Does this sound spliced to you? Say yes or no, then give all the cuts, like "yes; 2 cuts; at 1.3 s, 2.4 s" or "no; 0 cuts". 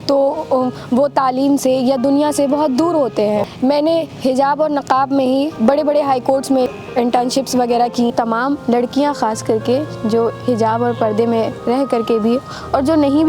yes; 4 cuts; at 3.5 s, 5.5 s, 6.7 s, 8.1 s